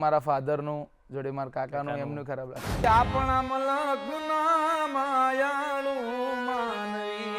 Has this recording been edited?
yes; 1 cut; at 2.8 s

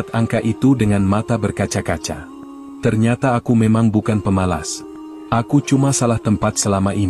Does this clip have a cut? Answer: no; 0 cuts

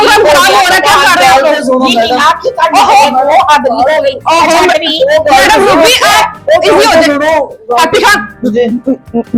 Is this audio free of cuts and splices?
yes; 0 cuts

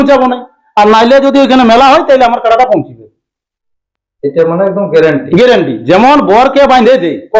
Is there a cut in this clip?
no; 0 cuts

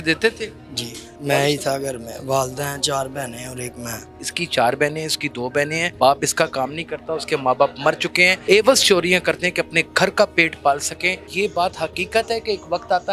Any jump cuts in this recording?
yes; 5 cuts; at 1.1 s, 4.2 s, 5.9 s, 8.4 s, 11.3 s

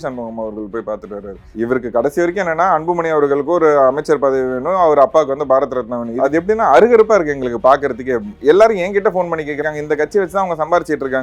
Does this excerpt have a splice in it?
yes; 3 cuts; at 1.4 s, 6.1 s, 9.6 s

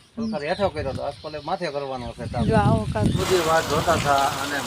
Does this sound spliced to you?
yes; 1 cut; at 3.2 s

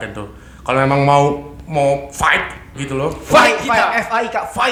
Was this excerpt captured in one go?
yes; 0 cuts

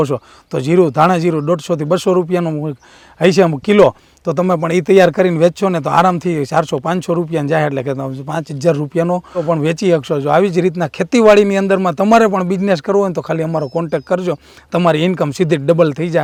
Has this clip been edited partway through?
no; 0 cuts

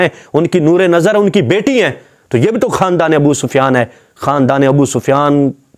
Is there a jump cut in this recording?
no; 0 cuts

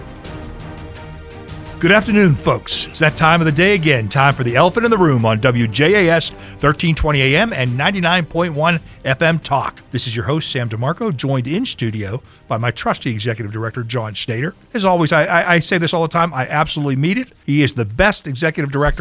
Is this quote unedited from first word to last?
no; 1 cut; at 1.8 s

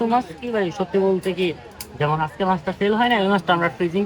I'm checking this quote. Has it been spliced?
no; 0 cuts

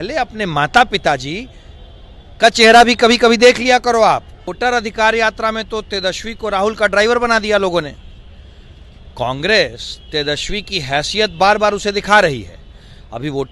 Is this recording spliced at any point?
yes; 1 cut; at 4.5 s

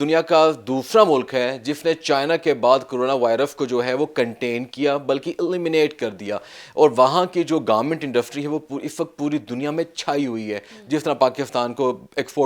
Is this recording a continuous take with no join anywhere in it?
yes; 0 cuts

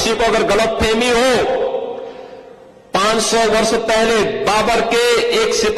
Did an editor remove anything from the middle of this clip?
no; 0 cuts

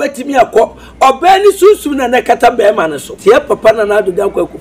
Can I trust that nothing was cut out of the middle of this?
no; 1 cut; at 3.1 s

